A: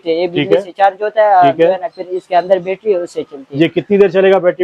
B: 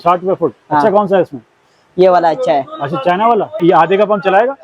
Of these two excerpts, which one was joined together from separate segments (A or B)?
B